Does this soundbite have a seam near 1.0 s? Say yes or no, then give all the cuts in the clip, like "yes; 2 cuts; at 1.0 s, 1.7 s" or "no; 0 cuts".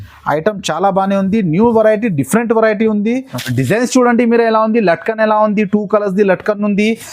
no; 1 cut; at 3.4 s